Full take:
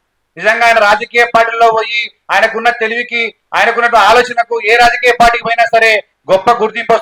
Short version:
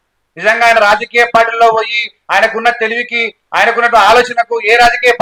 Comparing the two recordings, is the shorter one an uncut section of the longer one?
yes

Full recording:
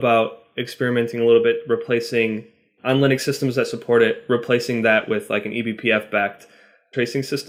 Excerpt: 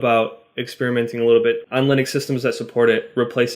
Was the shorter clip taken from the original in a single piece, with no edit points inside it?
no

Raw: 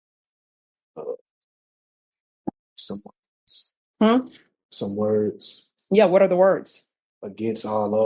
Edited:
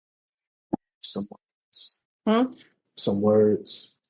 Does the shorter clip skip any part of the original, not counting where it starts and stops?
no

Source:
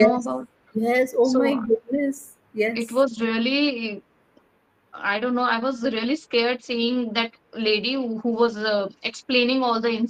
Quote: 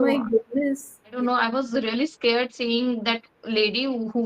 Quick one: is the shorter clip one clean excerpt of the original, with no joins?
no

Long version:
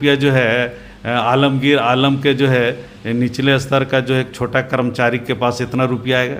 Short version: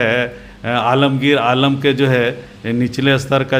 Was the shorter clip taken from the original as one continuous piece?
yes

